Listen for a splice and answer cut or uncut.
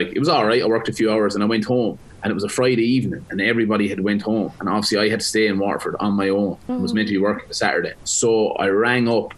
cut